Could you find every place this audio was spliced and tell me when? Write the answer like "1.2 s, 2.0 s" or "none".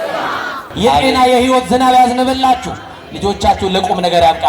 1.0 s